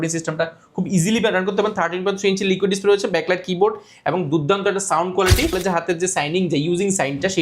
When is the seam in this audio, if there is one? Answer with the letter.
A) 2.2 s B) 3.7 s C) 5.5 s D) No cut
C